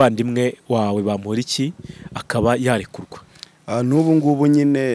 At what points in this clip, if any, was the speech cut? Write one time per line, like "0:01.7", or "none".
none